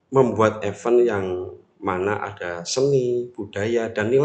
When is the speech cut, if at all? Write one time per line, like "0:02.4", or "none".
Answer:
none